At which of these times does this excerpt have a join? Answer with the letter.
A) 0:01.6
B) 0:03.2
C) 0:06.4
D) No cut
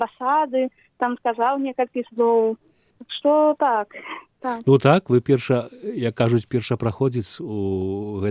D